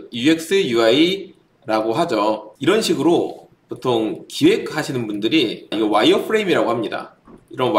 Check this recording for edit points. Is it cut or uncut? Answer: cut